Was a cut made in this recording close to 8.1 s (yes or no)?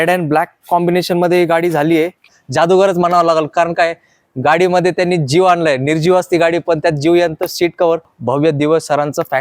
yes